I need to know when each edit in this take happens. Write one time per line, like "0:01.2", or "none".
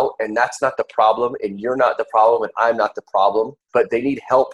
0:03.6

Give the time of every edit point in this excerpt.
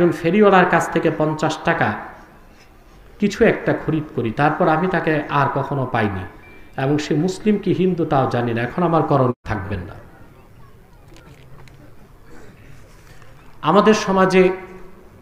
0:09.3

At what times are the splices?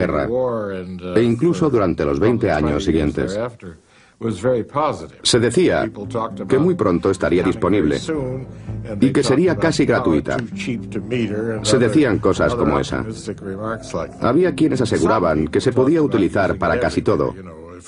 none

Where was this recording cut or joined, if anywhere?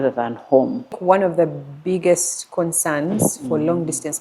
0:01.0

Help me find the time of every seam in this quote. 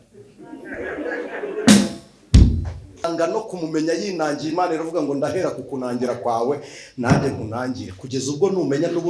0:03.0

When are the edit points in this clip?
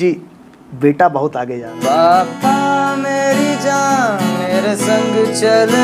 0:01.7

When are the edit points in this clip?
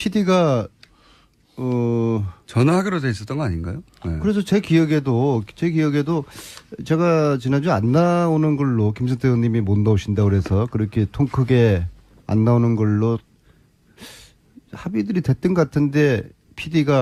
none

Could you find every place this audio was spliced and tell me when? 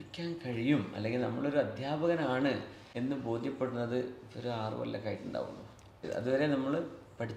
0:02.8
0:06.0

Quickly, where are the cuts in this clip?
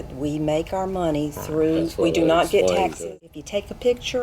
0:03.0

